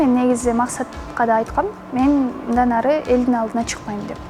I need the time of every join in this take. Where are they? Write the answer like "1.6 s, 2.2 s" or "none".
none